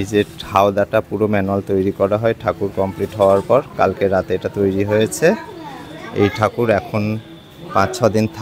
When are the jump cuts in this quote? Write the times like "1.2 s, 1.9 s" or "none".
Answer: none